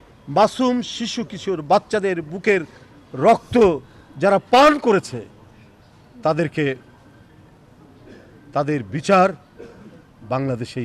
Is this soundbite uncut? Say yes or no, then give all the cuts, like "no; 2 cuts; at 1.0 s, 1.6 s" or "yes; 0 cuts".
yes; 0 cuts